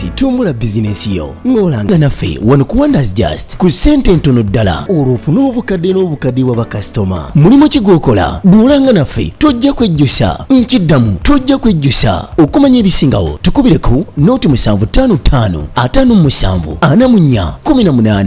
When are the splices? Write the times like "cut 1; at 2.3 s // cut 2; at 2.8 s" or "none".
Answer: none